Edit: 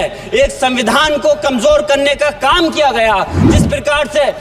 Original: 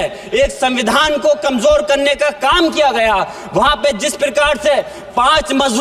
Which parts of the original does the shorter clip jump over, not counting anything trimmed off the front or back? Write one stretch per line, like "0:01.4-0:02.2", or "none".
0:03.5-0:04.0